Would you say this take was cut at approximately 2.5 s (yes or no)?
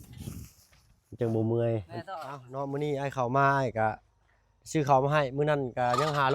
yes